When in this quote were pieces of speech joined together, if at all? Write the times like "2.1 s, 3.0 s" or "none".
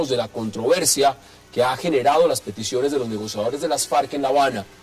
3.3 s